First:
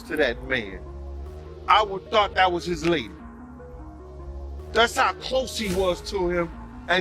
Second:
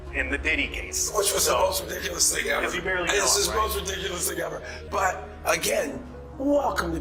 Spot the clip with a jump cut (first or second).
first